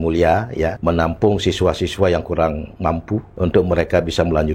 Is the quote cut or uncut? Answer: cut